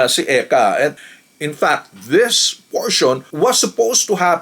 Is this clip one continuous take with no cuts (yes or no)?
no